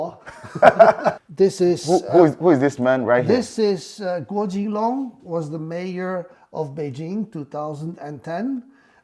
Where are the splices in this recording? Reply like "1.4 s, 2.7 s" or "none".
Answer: 1.2 s